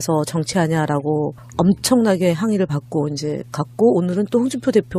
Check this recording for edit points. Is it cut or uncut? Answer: cut